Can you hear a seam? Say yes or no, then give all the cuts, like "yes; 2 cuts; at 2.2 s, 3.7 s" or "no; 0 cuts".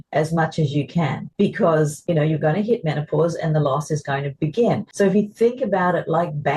yes; 3 cuts; at 1.2 s, 2.0 s, 4.9 s